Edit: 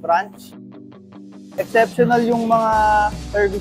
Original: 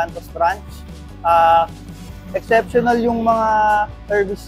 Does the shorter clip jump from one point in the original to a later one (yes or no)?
yes